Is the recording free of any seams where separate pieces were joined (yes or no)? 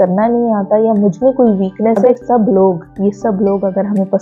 no